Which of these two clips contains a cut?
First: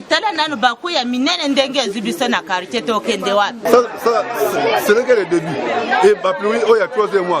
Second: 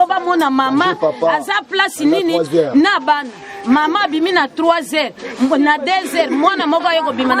first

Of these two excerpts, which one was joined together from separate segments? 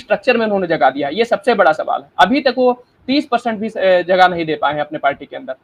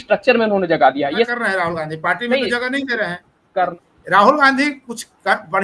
second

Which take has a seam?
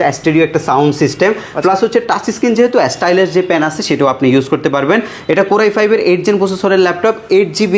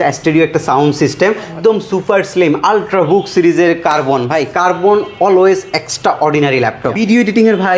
second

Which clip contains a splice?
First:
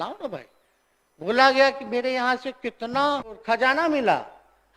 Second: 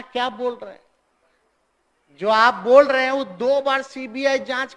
first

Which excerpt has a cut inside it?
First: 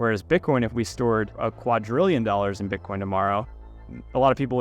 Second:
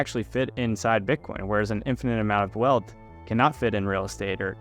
first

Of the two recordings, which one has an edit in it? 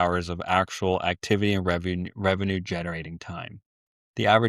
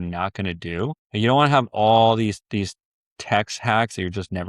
second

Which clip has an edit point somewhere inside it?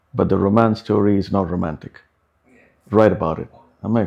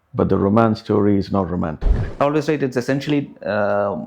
second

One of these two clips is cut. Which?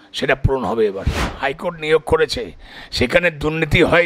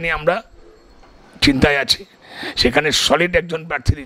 first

